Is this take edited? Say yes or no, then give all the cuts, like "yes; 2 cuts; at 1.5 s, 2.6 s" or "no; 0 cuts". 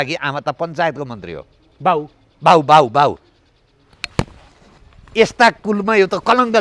no; 0 cuts